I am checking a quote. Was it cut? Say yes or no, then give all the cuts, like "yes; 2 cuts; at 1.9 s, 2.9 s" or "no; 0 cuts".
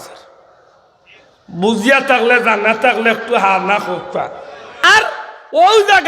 yes; 1 cut; at 5.1 s